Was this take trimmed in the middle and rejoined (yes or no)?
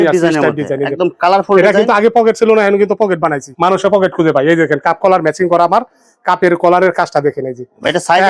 no